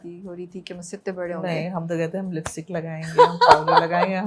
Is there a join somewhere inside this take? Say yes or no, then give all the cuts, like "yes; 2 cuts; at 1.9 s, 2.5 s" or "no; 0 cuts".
no; 0 cuts